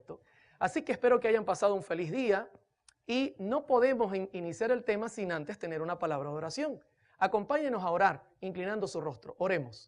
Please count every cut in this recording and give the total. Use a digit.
0